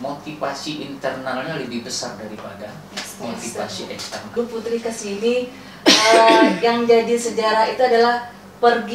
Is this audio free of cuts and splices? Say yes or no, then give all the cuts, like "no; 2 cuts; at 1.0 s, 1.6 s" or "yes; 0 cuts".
no; 1 cut; at 4.3 s